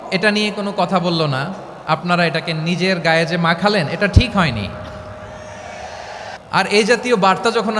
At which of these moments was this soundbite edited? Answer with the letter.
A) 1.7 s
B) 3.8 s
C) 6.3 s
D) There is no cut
C